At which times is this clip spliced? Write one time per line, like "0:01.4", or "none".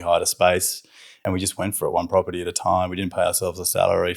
0:01.2